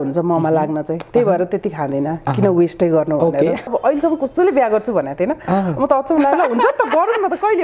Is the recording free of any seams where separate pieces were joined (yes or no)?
no